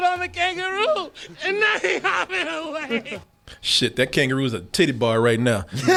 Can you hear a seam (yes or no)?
no